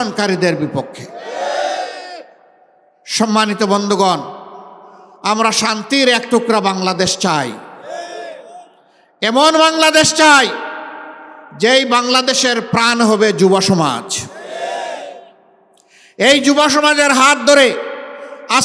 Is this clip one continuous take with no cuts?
yes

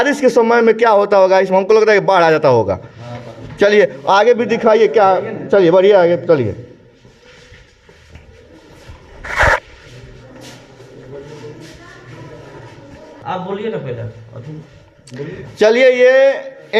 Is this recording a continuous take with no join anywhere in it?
yes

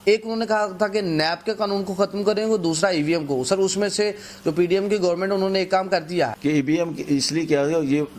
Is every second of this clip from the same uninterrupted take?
no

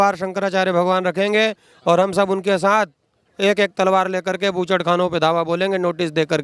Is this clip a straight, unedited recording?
yes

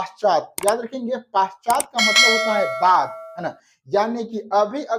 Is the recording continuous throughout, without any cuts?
yes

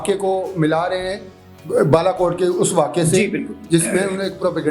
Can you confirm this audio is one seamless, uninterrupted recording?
yes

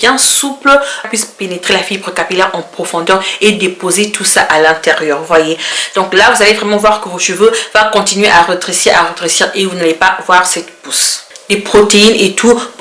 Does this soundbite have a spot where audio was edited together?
yes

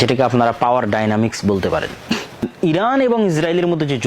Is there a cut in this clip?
yes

